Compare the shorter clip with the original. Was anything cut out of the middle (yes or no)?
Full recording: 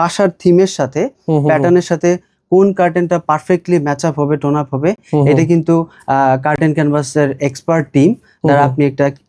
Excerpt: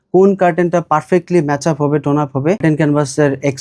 yes